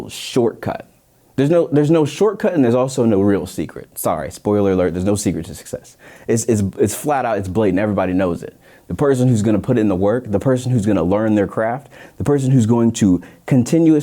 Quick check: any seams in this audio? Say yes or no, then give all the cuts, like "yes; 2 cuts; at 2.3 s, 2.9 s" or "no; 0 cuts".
no; 0 cuts